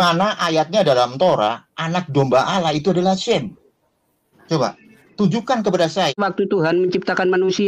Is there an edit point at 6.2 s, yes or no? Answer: yes